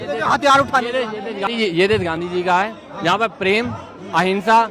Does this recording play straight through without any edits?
no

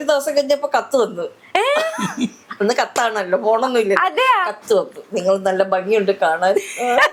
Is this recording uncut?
yes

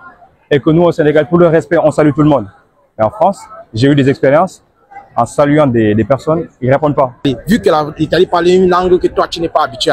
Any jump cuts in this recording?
yes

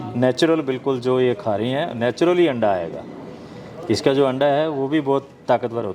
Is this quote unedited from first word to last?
yes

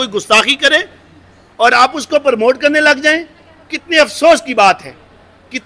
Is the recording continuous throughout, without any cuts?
yes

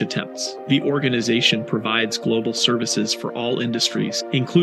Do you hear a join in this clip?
no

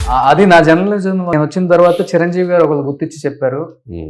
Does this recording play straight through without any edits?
no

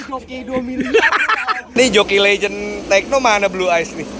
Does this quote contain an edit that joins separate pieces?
yes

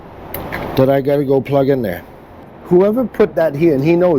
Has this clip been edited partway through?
yes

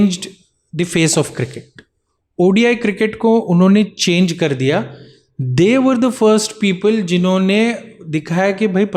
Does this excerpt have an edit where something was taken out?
no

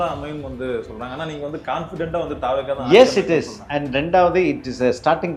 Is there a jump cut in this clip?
no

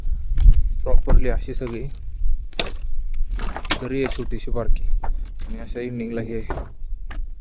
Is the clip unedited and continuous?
yes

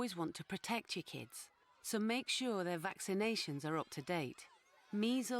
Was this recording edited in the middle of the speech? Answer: no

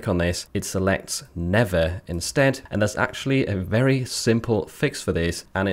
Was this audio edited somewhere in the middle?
yes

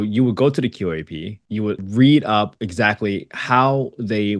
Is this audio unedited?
yes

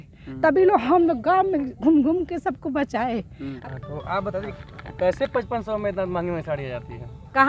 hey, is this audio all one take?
no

